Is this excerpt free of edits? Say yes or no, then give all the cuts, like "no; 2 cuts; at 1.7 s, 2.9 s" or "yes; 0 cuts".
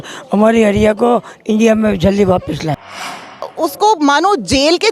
no; 1 cut; at 3.4 s